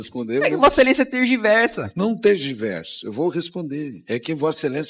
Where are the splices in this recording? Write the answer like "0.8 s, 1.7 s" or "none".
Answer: none